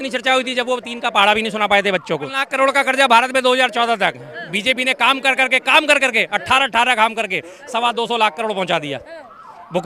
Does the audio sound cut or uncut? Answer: cut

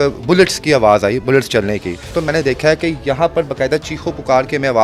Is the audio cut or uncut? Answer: cut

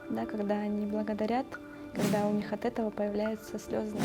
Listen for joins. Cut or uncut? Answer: uncut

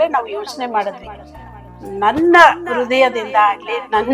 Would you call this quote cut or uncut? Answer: uncut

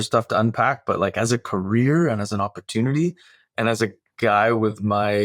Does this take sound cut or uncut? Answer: uncut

